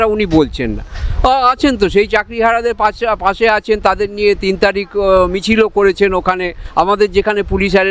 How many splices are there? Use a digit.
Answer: 0